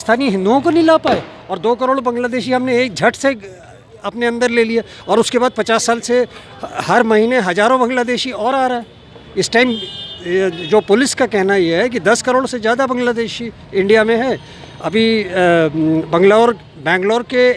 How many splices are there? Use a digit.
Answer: 0